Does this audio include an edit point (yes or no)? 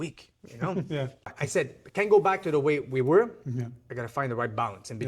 yes